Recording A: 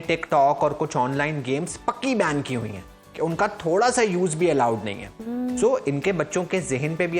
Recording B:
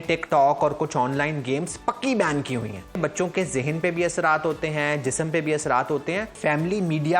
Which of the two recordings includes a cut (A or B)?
B